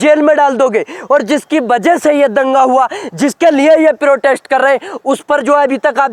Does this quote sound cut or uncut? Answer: uncut